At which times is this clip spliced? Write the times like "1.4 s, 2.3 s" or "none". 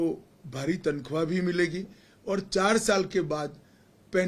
none